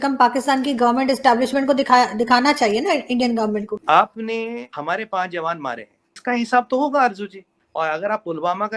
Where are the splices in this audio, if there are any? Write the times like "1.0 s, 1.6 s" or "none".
3.8 s, 7.5 s